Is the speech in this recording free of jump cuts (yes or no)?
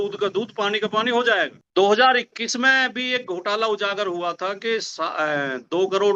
no